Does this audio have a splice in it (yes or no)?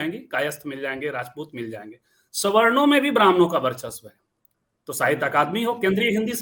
no